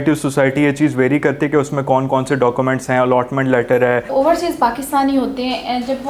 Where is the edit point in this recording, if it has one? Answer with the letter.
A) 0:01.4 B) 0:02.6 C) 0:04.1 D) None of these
C